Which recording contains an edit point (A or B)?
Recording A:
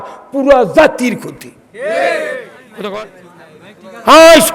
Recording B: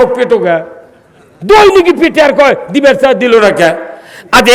A